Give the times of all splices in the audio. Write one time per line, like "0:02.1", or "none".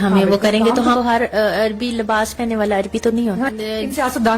0:01.0
0:03.5